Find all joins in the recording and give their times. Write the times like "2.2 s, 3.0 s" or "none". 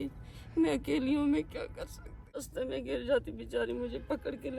2.4 s